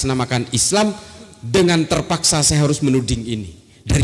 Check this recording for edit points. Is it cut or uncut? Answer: uncut